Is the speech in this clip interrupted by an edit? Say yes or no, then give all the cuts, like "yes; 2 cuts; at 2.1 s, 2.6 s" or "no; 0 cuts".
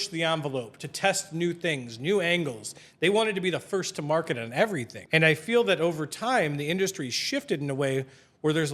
yes; 1 cut; at 4.9 s